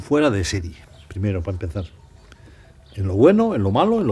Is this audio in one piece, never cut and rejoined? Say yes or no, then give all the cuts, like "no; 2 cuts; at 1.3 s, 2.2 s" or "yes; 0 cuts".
yes; 0 cuts